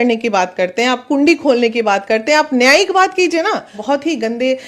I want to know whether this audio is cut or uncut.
cut